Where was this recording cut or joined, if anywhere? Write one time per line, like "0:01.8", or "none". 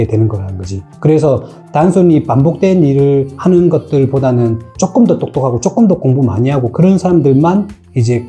none